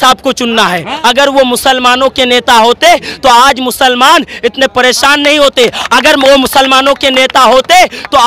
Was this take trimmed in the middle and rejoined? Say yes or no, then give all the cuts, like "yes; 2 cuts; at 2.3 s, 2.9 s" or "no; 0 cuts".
yes; 1 cut; at 0.9 s